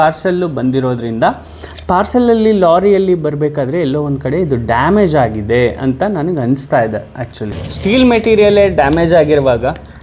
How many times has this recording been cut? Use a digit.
1